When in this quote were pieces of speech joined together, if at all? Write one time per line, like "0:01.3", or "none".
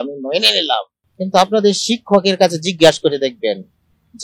0:01.0